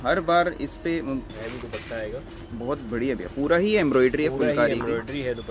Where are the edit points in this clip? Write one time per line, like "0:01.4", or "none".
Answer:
0:01.3